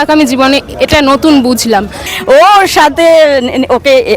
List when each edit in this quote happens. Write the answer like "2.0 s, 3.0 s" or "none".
2.1 s

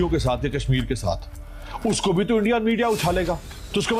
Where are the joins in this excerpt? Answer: none

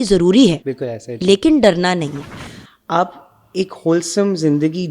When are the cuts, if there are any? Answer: 2.3 s

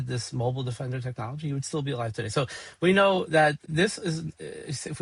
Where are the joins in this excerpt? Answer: none

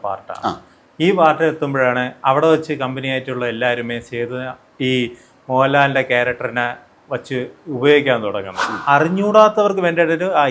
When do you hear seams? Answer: 8.7 s

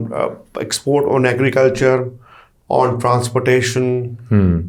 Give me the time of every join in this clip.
none

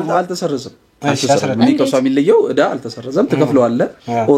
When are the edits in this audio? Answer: none

